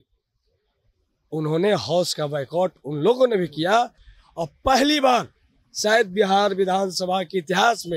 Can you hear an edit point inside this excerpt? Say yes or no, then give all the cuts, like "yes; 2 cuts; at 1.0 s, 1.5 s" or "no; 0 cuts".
no; 0 cuts